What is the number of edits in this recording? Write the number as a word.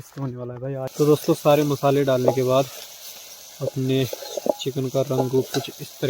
one